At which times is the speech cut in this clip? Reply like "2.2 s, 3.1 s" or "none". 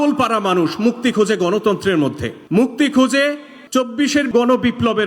2.3 s, 4.3 s